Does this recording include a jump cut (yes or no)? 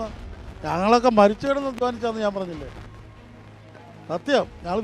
no